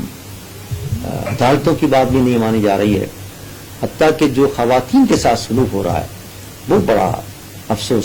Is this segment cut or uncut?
uncut